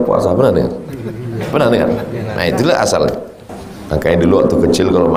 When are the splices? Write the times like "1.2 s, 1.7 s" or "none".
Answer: 3.6 s